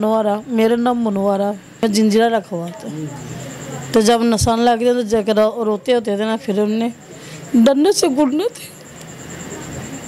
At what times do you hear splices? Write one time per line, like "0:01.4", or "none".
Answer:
0:01.8